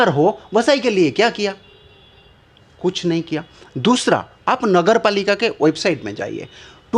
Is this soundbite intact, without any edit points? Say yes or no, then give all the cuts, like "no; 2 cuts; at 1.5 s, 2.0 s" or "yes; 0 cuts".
yes; 0 cuts